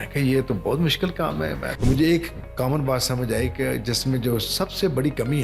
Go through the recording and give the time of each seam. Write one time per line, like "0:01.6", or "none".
0:01.7